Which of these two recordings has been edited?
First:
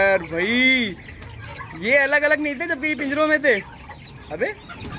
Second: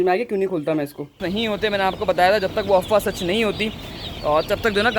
second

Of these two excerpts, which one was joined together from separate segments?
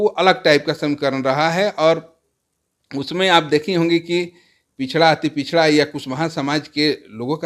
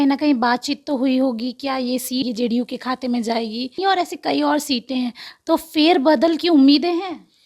second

